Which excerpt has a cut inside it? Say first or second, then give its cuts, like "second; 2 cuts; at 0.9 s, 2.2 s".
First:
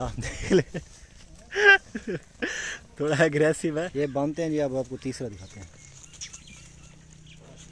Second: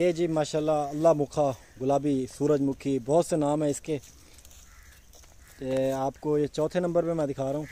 first; 1 cut; at 3.8 s